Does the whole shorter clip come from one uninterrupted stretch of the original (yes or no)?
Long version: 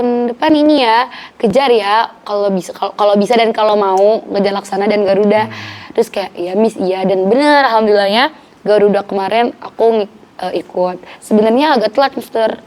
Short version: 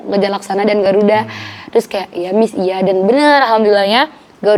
yes